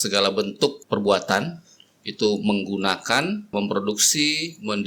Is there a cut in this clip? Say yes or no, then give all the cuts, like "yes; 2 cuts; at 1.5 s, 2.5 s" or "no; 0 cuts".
yes; 2 cuts; at 0.8 s, 3.5 s